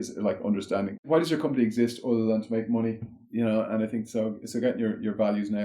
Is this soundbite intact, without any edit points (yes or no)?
no